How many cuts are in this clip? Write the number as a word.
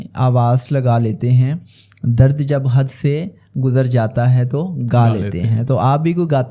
zero